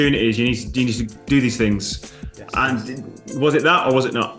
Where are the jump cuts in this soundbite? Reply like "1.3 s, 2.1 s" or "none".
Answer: none